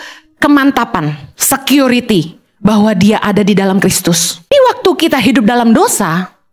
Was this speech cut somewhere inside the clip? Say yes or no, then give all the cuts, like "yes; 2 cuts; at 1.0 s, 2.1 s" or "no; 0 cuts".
yes; 1 cut; at 4.5 s